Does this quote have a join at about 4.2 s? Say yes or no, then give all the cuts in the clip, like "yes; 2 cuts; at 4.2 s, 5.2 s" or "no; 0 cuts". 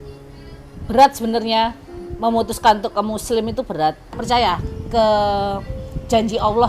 yes; 1 cut; at 4.2 s